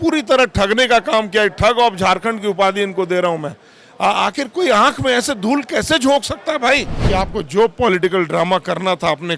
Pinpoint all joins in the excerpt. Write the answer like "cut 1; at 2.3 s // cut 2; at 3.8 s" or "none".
cut 1; at 6.9 s